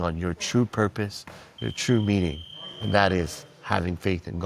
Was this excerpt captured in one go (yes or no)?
yes